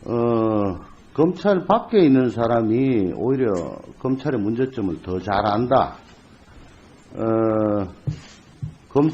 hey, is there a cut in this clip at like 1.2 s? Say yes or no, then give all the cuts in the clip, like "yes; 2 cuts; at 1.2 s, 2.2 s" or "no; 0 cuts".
no; 1 cut; at 7.1 s